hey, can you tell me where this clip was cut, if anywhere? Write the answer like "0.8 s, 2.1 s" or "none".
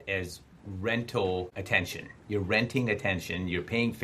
none